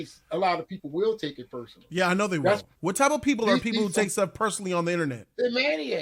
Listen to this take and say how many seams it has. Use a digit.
1